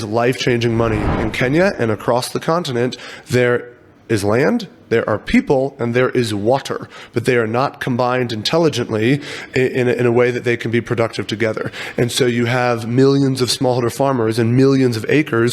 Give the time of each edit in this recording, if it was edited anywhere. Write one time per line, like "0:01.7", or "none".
0:01.3